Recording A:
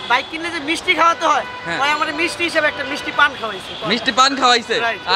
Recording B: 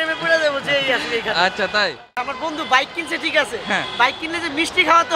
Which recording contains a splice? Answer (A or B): B